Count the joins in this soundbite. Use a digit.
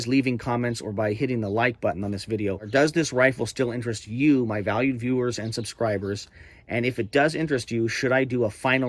1